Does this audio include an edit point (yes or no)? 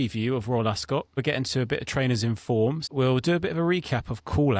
yes